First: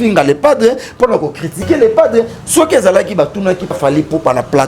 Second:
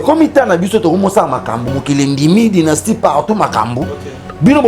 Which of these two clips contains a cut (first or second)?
first